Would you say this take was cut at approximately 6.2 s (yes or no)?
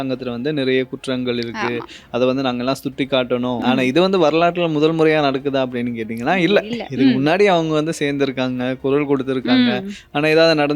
no